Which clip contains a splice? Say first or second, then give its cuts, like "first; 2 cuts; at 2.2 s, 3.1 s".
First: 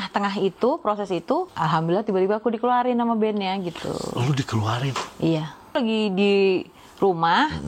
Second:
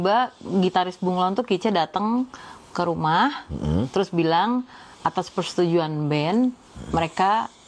first; 2 cuts; at 1.5 s, 5.8 s